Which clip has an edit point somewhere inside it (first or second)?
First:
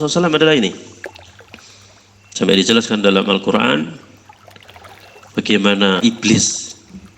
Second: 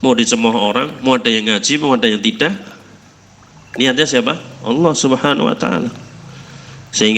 first